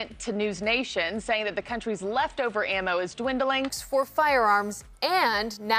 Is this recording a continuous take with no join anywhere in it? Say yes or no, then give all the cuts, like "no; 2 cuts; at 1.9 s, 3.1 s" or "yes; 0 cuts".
yes; 0 cuts